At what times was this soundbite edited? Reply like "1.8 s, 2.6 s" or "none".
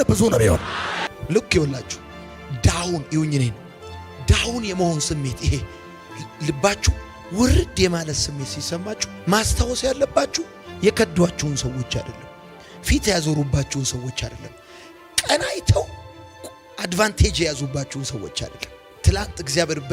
1.0 s